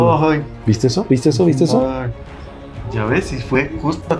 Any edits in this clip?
yes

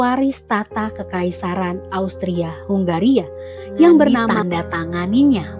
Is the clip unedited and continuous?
no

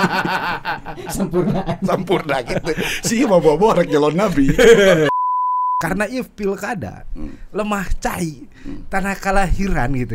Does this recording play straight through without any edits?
no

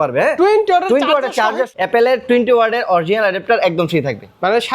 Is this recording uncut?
no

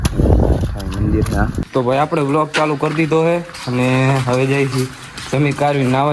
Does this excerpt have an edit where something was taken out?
yes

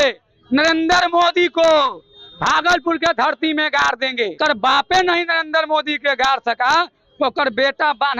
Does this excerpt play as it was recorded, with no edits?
no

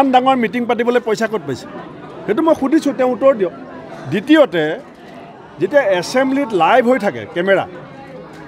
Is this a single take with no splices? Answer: yes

